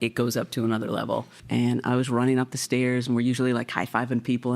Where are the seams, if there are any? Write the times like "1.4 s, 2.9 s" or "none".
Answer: 1.4 s